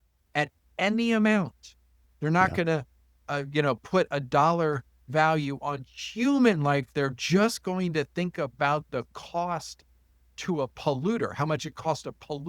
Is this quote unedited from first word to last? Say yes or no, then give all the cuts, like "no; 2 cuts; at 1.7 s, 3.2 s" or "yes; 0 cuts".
yes; 0 cuts